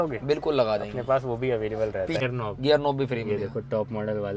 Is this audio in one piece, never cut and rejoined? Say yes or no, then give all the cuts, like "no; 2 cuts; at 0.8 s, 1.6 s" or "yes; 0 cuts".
no; 1 cut; at 2.2 s